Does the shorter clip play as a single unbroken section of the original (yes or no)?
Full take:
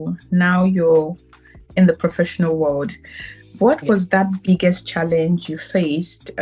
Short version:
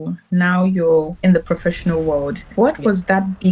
no